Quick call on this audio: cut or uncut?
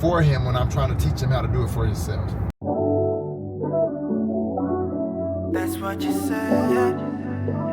cut